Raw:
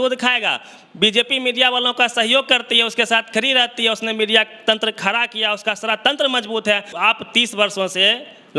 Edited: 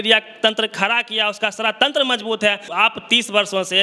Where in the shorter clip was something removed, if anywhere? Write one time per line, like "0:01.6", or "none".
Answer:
none